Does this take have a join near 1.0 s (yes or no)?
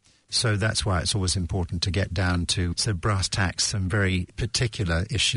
no